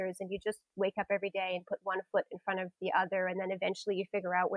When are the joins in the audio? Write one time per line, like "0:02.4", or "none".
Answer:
none